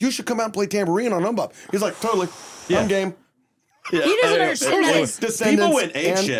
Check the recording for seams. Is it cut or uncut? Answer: uncut